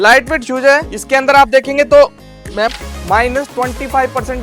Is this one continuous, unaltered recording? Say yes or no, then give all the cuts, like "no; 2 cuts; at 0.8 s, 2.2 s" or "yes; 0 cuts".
no; 1 cut; at 2.7 s